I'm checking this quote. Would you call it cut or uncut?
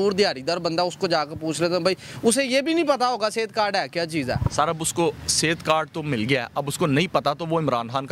uncut